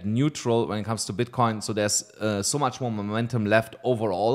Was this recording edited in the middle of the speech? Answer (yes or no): no